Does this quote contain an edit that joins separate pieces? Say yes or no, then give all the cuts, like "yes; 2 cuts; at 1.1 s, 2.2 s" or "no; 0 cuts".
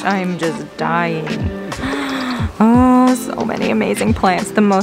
no; 0 cuts